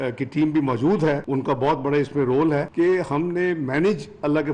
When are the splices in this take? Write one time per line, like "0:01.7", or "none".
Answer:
0:01.2
0:02.7

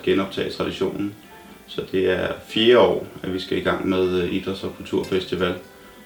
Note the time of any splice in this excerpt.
none

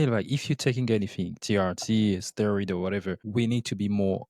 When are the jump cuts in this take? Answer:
0:03.2

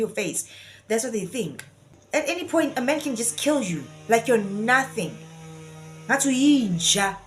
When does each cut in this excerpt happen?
0:01.9

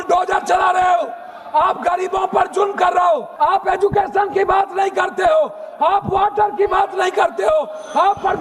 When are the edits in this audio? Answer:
0:03.3

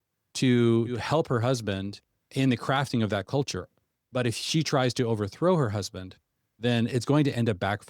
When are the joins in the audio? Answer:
0:01.0
0:02.3

